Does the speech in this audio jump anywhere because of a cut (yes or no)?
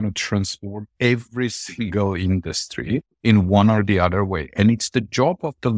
yes